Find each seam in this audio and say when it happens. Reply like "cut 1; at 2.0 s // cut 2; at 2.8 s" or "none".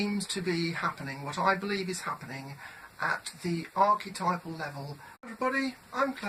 none